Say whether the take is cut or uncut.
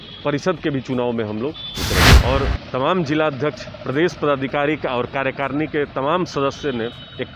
cut